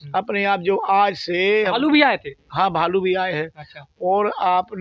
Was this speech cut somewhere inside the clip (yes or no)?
no